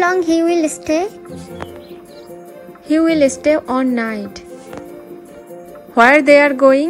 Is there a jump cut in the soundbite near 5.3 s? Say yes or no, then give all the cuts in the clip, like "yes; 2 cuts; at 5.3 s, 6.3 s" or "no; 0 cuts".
yes; 2 cuts; at 2.5 s, 5.3 s